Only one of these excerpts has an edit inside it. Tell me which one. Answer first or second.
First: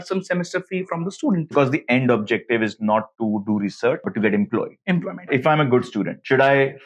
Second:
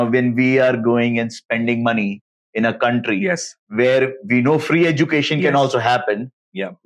first